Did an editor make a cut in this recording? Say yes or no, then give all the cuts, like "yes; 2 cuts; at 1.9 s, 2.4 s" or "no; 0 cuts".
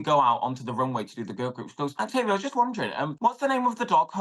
yes; 2 cuts; at 1.9 s, 3.1 s